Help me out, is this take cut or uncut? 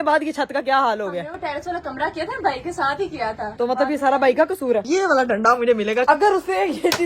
cut